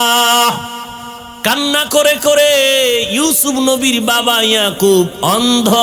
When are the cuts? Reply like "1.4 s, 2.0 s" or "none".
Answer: 1.3 s